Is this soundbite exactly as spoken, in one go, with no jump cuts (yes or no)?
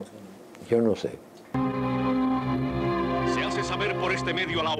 no